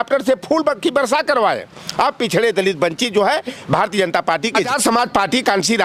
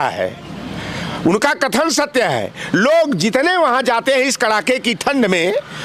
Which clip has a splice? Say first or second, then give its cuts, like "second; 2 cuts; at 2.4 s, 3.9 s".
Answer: first; 1 cut; at 4.7 s